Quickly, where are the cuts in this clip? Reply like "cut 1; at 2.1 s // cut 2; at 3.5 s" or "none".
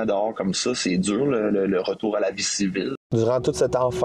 cut 1; at 2.9 s